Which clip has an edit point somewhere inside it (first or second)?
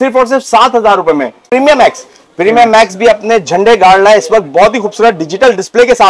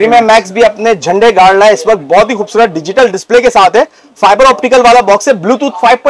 first